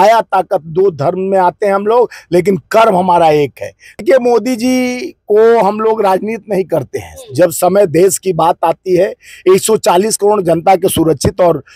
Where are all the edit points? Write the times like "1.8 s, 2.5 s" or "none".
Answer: 4.0 s